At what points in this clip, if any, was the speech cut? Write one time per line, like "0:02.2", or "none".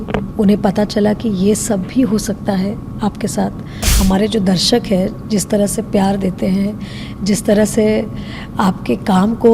0:03.9